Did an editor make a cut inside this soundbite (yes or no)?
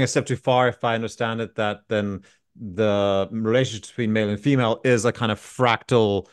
no